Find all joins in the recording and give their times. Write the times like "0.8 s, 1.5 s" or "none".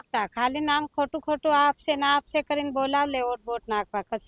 none